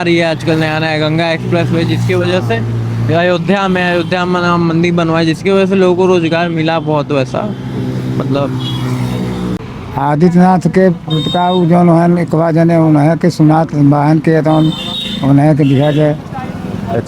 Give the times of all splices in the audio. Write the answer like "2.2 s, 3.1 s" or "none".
9.6 s